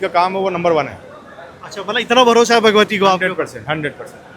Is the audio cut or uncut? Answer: uncut